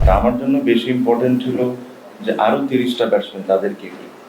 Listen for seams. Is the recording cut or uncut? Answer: uncut